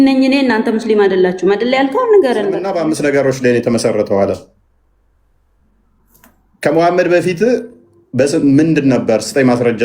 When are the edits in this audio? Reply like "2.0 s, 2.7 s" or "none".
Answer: 2.7 s